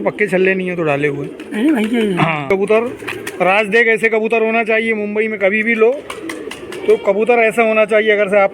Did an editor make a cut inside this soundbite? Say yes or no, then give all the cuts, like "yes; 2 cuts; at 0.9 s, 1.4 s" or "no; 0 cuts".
yes; 1 cut; at 2.5 s